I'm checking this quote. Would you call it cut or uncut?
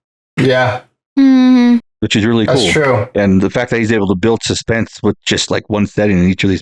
uncut